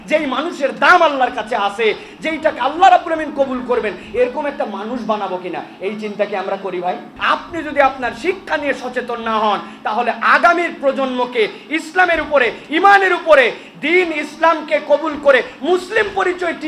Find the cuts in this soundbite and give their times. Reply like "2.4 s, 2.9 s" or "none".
7.1 s